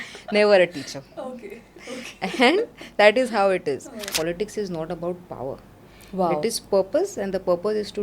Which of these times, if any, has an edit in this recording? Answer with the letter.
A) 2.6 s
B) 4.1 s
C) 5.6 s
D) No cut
B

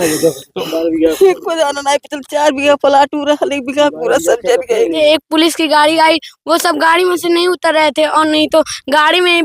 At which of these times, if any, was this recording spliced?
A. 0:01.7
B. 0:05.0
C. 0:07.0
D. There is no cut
B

